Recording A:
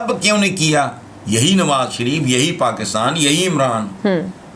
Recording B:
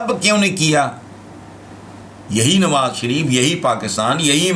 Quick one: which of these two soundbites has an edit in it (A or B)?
A